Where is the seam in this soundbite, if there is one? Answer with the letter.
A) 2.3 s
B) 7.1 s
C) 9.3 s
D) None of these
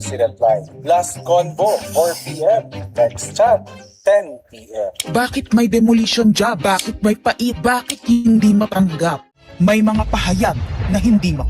C